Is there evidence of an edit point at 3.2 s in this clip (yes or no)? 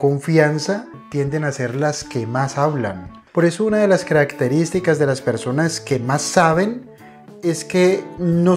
yes